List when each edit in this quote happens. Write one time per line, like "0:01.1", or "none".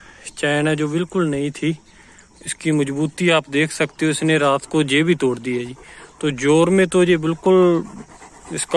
none